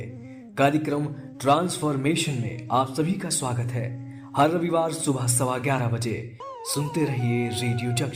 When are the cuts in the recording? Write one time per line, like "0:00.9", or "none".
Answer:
0:06.4